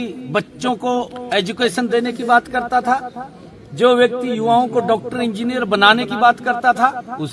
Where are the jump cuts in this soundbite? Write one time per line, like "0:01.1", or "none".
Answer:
none